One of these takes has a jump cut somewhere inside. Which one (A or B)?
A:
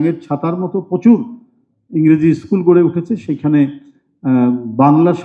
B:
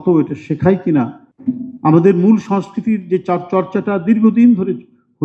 B